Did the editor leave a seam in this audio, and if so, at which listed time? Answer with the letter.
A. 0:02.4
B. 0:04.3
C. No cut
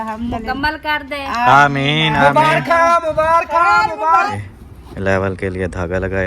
B